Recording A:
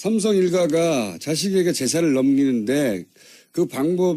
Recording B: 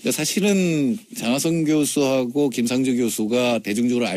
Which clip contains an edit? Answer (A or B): B